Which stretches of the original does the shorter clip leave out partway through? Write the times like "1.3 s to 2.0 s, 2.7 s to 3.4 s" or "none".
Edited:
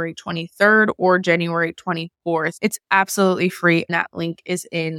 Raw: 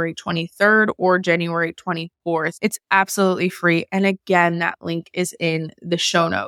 3.9 s to 4.6 s